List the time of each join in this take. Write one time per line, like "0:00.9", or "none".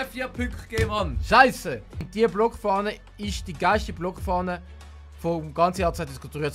0:02.0

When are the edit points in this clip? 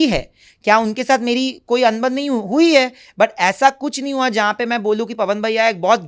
none

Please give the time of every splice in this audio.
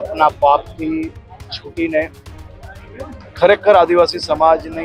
none

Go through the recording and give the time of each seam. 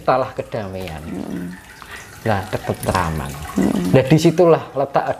none

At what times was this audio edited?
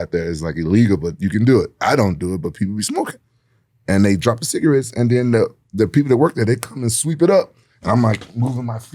none

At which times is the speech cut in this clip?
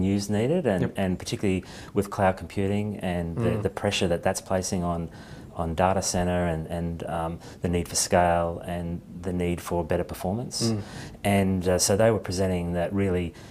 0:04.5

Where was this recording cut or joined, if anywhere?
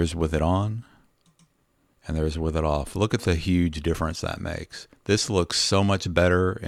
none

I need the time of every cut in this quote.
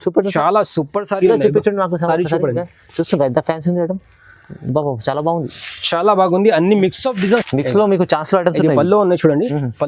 0:07.4

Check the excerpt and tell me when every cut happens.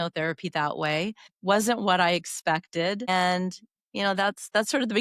0:01.3
0:03.1

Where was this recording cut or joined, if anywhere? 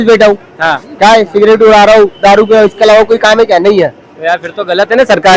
none

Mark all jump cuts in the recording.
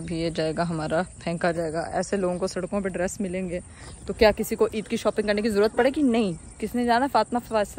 none

